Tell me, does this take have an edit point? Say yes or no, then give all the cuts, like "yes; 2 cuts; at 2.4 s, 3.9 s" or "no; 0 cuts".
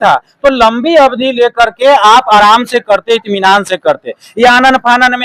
no; 0 cuts